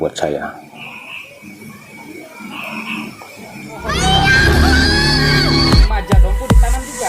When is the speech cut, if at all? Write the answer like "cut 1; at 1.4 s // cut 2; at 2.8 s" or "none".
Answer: cut 1; at 3.6 s